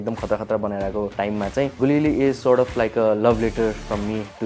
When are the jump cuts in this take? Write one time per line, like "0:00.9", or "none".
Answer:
0:01.6